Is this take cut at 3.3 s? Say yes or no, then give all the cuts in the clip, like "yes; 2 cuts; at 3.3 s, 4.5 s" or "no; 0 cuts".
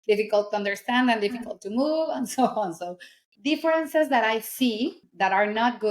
yes; 2 cuts; at 3.3 s, 5.0 s